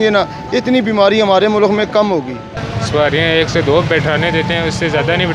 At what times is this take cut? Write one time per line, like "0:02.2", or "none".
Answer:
none